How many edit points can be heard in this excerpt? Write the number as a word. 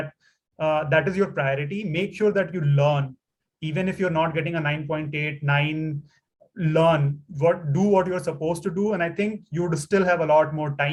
zero